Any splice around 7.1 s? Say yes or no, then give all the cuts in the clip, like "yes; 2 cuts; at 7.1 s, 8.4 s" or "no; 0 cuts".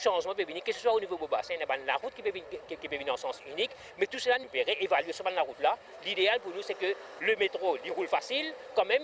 yes; 3 cuts; at 4.4 s, 5.9 s, 7.1 s